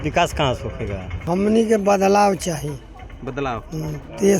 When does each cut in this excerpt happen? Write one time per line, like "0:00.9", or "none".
0:01.1